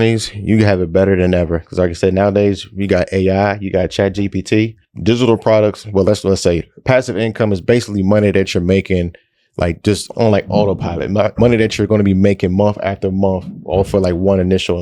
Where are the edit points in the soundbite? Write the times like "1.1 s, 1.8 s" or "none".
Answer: 4.8 s, 10.1 s

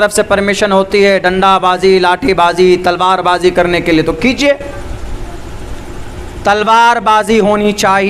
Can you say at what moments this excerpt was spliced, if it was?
none

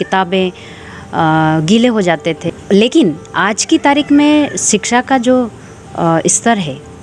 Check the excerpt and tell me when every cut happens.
2.4 s

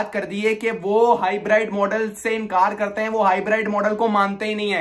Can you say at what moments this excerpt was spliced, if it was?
none

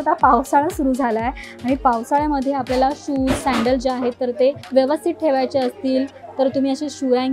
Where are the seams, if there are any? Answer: 4.6 s

